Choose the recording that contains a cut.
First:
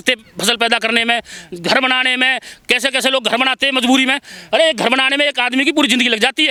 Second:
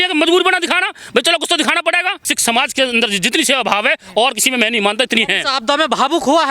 second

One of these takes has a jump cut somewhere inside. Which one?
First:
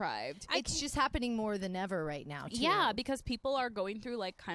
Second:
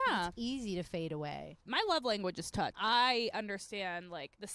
second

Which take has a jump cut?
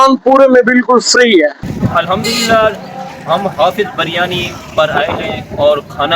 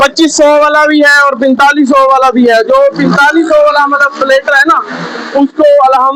first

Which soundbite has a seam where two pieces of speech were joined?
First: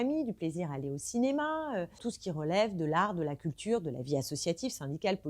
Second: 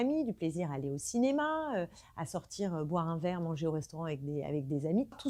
first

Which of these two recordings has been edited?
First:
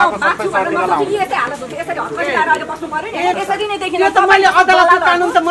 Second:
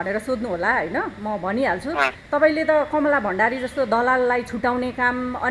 first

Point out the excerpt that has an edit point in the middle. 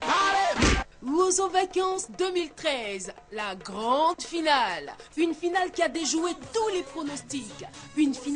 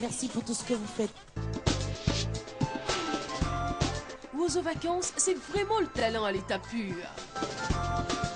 first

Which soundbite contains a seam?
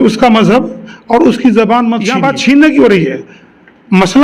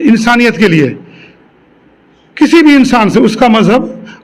first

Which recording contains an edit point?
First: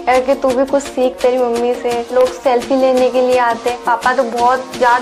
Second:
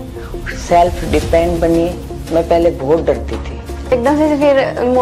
second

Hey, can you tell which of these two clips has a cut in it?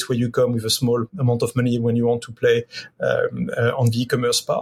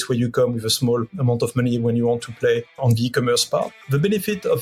second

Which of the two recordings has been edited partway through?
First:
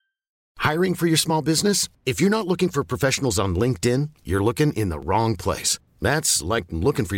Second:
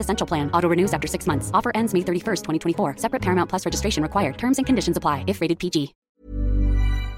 second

